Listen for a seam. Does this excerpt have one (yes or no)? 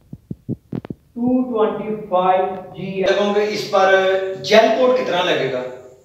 yes